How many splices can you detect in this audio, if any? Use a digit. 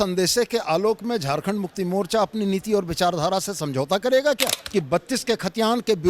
1